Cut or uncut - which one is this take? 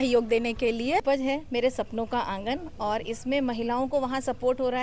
cut